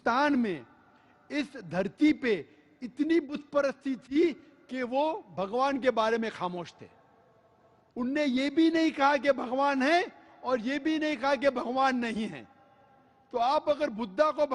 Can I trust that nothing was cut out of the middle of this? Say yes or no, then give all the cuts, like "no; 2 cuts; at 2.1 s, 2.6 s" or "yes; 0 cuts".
no; 1 cut; at 10.6 s